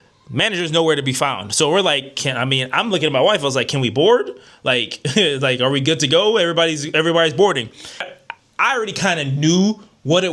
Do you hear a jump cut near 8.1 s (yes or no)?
yes